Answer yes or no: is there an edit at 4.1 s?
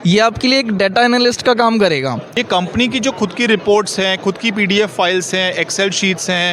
no